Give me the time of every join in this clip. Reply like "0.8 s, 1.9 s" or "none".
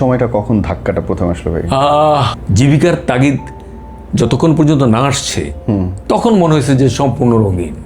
2.4 s